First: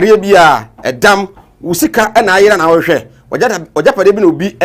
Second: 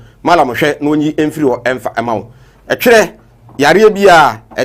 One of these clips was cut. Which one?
first; 1 cut; at 2.2 s

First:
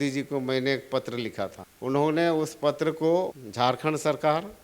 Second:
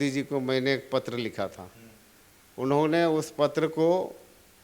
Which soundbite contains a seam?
first; 2 cuts; at 1.7 s, 3.4 s

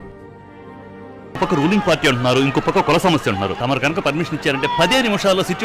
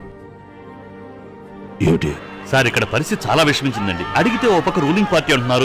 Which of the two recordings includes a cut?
first; 2 cuts; at 1.4 s, 3.6 s

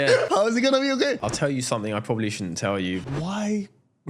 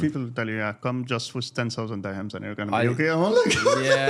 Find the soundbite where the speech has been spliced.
first; 2 cuts; at 1.1 s, 3.0 s

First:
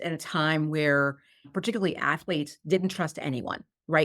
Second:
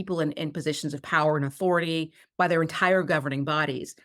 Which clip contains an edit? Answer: first; 1 cut; at 1.5 s

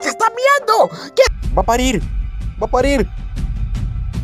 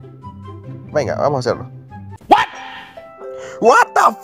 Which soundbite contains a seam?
first; 1 cut; at 1.3 s

